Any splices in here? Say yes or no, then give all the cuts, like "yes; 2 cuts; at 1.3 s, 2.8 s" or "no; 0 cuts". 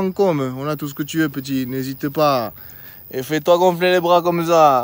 no; 0 cuts